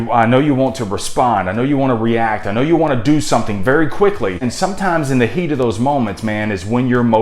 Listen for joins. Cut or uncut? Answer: cut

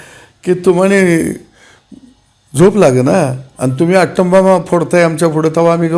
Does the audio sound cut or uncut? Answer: uncut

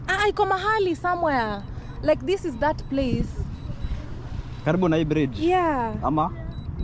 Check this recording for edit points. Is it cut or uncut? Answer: uncut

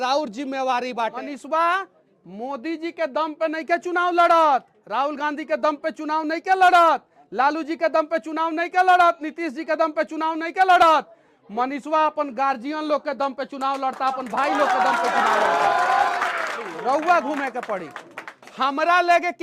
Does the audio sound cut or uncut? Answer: cut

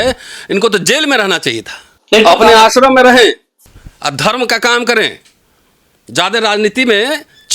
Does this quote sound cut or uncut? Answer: cut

